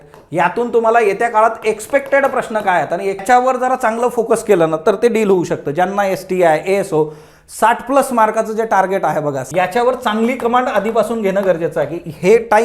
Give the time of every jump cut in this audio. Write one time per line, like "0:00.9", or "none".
0:03.2
0:09.4